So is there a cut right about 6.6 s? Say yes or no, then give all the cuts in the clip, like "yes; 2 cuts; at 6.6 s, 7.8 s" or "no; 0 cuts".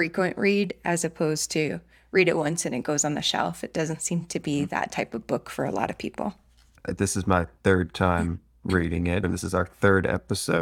no; 1 cut; at 9.2 s